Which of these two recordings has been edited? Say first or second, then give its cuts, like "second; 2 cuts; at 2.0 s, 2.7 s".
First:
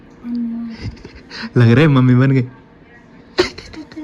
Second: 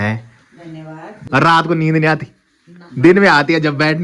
second; 1 cut; at 1.2 s